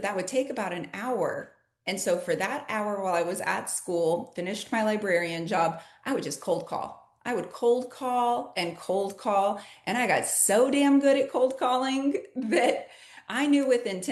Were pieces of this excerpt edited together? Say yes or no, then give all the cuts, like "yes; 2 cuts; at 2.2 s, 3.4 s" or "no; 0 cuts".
no; 0 cuts